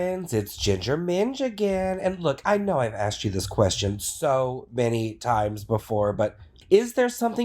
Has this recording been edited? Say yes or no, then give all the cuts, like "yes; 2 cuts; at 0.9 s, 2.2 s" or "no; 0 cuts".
yes; 1 cut; at 6.5 s